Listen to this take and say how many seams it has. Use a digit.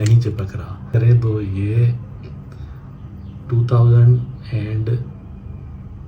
1